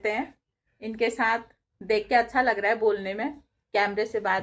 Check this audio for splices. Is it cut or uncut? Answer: uncut